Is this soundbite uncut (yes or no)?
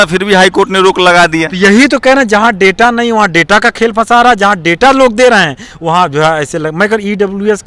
yes